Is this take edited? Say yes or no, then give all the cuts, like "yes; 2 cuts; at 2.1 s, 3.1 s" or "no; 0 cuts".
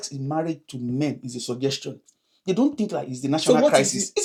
no; 0 cuts